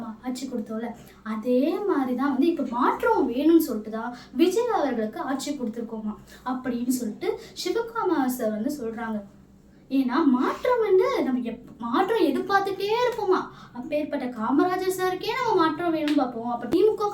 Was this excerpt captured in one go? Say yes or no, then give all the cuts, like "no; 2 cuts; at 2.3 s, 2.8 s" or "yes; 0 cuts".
yes; 0 cuts